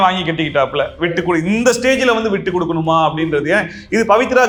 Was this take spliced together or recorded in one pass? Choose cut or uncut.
uncut